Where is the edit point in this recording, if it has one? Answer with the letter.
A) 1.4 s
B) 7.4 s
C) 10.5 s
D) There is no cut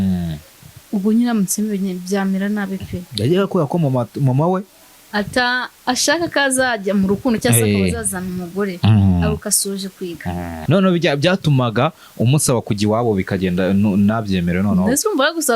C